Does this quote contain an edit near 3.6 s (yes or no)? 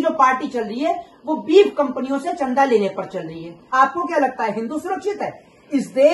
yes